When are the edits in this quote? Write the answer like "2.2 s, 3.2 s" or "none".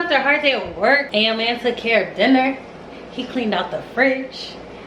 1.1 s